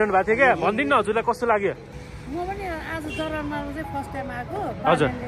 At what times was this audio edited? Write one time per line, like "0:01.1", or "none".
0:02.1